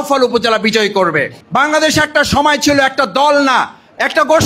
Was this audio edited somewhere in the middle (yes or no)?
yes